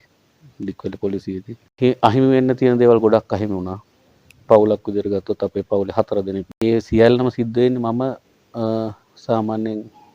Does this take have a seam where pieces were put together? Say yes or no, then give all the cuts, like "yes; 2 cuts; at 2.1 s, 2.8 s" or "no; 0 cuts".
yes; 2 cuts; at 1.6 s, 6.5 s